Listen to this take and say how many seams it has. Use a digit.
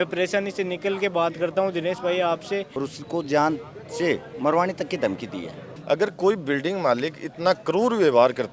2